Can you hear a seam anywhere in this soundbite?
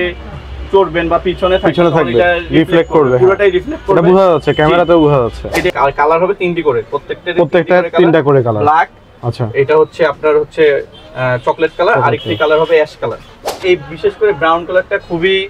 yes; 2 cuts; at 5.7 s, 13.5 s

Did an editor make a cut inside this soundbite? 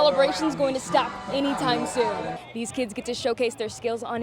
yes; 1 cut; at 2.4 s

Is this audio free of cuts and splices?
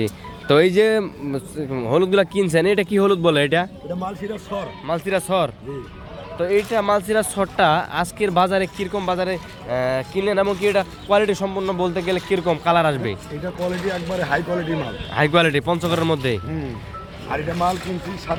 yes; 0 cuts

